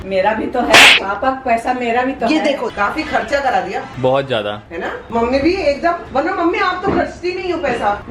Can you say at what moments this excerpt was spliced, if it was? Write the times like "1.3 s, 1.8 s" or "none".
1.0 s, 2.7 s